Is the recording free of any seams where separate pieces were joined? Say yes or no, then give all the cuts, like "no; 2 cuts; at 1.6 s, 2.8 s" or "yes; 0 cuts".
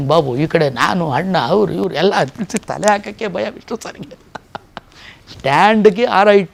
yes; 0 cuts